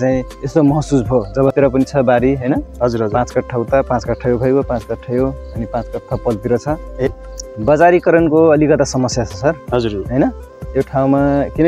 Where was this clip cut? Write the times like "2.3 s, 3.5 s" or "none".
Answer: 1.5 s, 7.1 s